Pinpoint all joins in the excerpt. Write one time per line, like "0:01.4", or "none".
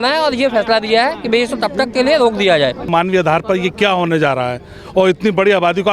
0:02.8